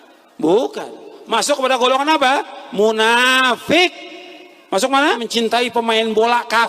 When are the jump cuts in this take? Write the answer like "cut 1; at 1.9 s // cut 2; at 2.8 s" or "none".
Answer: cut 1; at 5.2 s